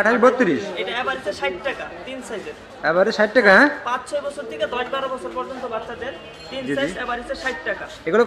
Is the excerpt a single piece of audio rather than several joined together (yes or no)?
yes